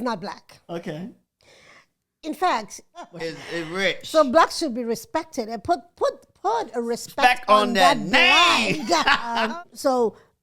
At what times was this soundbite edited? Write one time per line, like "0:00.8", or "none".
0:03.2
0:09.3